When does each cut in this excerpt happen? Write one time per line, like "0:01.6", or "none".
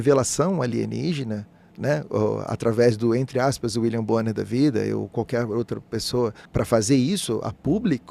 0:06.4